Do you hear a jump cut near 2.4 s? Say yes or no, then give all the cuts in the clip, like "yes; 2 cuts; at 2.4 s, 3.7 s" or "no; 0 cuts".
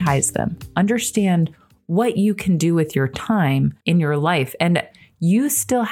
no; 2 cuts; at 3.8 s, 4.9 s